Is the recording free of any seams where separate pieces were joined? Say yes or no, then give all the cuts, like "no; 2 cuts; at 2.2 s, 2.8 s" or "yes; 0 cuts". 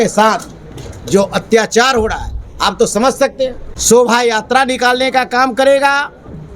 no; 1 cut; at 3.7 s